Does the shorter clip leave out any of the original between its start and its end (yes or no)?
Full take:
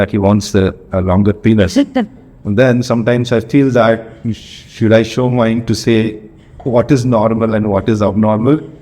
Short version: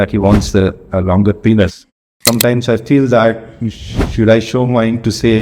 yes